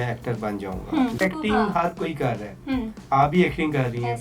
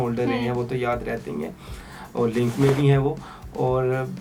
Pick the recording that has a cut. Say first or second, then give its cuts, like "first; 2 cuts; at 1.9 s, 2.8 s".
first; 1 cut; at 1.2 s